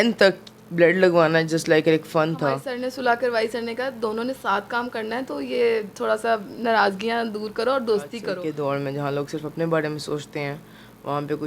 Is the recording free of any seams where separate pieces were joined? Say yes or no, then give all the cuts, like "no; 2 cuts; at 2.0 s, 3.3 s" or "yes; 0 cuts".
no; 2 cuts; at 2.7 s, 8.3 s